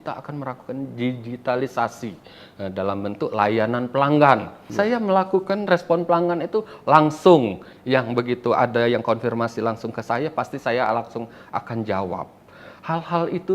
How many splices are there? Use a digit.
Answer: 1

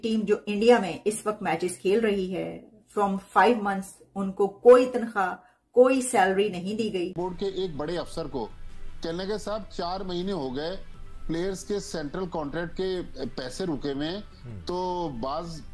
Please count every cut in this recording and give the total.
1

